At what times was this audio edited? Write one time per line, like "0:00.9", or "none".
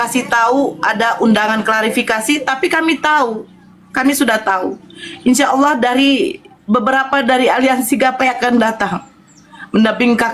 none